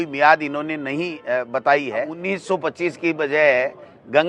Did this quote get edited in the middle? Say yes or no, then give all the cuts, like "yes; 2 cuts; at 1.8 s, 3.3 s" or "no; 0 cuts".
yes; 1 cut; at 2.2 s